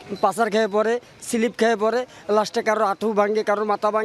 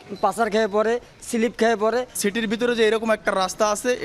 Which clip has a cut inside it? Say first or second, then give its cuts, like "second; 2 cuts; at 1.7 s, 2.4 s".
second; 1 cut; at 2.1 s